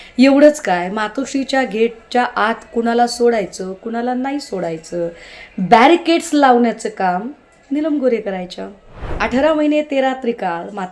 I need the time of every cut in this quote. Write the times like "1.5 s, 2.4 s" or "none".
9.2 s